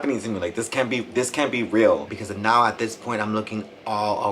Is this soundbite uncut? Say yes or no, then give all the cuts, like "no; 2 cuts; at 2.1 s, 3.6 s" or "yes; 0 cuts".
no; 1 cut; at 2.1 s